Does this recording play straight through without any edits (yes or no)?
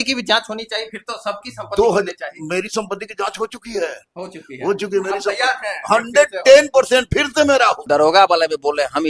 no